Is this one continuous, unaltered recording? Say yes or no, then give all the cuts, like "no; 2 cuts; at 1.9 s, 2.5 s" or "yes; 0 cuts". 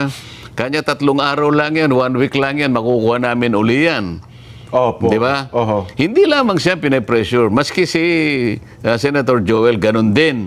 yes; 0 cuts